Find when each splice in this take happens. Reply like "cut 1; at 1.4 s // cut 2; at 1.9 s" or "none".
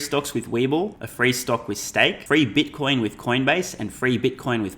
cut 1; at 1.0 s // cut 2; at 2.2 s